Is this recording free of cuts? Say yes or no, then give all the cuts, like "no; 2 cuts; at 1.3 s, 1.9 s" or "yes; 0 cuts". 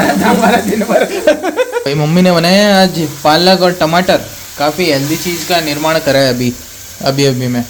yes; 0 cuts